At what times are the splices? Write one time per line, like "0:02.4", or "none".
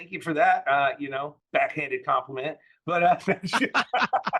0:01.3